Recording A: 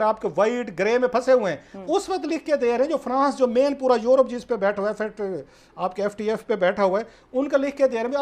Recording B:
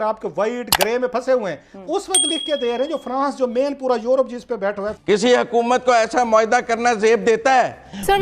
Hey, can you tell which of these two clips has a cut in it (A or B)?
B